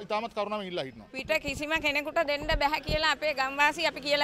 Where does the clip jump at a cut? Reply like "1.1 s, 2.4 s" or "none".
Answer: 1.0 s